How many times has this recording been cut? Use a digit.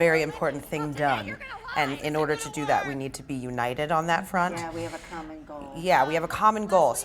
0